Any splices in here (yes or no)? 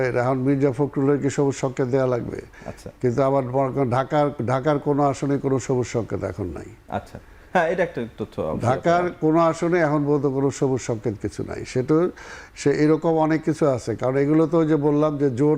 no